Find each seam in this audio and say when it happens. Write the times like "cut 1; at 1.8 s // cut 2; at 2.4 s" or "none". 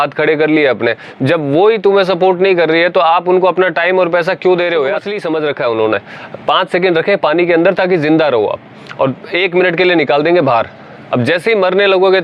cut 1; at 5.1 s